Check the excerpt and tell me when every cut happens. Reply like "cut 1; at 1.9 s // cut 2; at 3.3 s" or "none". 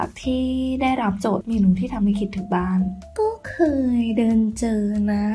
cut 1; at 1.4 s // cut 2; at 3.0 s